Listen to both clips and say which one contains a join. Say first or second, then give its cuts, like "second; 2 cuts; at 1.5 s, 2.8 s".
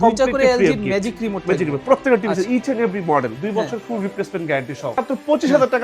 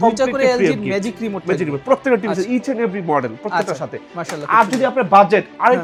first; 2 cuts; at 3.4 s, 5.0 s